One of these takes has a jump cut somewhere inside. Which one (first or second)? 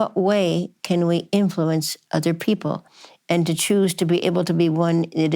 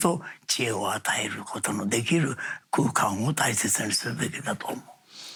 first